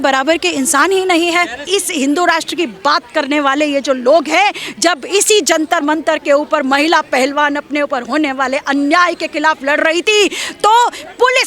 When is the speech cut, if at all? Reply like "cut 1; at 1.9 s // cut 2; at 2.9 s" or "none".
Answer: cut 1; at 1.7 s